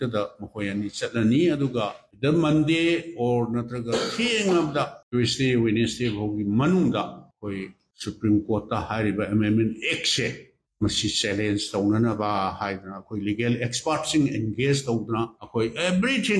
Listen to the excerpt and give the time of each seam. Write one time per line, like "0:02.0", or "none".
0:15.4